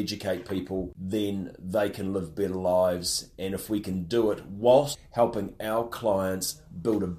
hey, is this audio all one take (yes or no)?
no